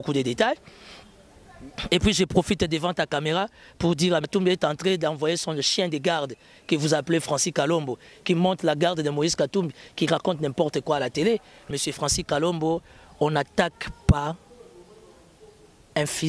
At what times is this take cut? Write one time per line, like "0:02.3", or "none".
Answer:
0:04.3
0:11.7